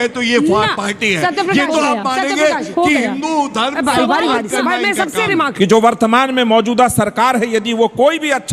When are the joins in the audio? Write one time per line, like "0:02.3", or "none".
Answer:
0:05.5